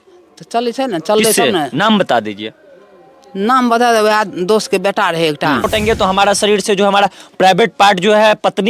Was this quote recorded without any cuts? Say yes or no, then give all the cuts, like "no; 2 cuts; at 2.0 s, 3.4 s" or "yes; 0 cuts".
no; 1 cut; at 5.7 s